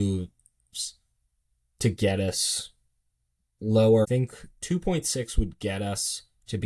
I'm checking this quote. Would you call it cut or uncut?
cut